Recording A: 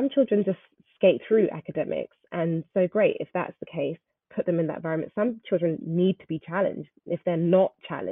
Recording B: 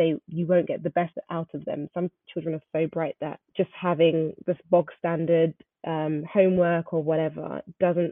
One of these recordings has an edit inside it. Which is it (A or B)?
B